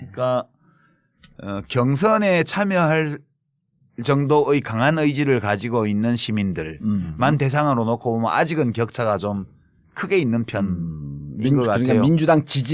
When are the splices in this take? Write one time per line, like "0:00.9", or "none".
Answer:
0:04.6